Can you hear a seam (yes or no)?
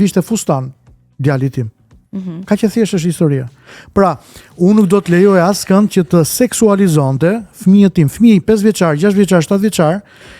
no